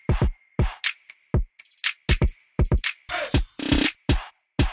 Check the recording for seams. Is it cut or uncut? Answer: cut